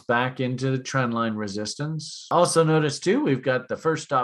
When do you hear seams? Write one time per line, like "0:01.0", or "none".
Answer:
0:02.1